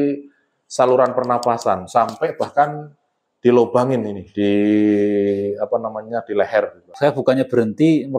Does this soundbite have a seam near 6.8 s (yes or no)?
yes